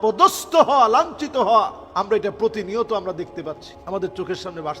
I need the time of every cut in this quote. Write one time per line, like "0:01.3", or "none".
0:01.8
0:03.7